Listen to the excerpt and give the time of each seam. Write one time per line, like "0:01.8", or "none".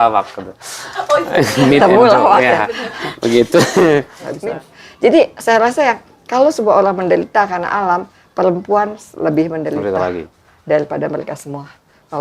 0:04.2

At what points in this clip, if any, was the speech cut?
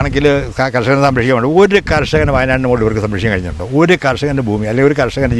none

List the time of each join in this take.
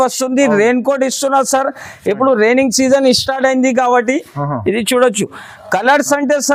none

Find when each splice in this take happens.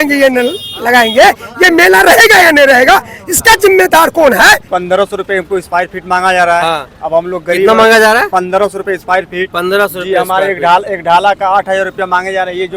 0:04.7

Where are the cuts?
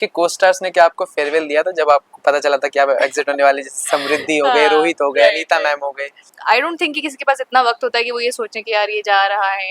0:06.2

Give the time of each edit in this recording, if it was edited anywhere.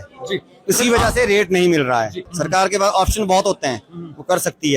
0:02.3

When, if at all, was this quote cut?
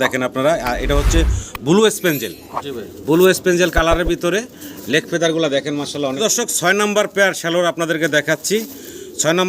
0:06.2

